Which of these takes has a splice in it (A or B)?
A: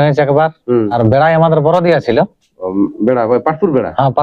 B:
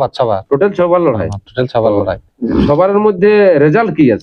A